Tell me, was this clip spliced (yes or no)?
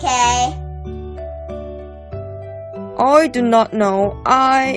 yes